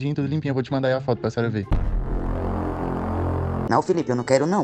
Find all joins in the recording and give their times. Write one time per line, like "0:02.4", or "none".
0:03.6